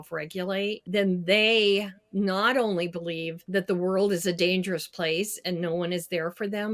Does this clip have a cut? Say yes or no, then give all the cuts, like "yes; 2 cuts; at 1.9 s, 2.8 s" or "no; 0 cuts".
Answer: yes; 2 cuts; at 0.8 s, 3.3 s